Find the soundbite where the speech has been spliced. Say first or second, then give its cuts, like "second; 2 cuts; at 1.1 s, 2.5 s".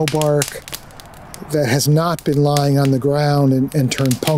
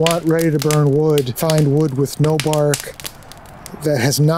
second; 1 cut; at 1.3 s